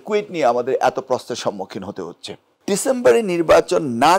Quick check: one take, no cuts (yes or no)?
no